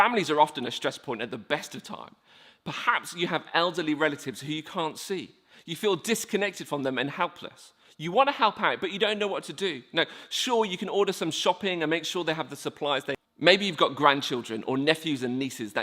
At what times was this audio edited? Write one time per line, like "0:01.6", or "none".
0:13.2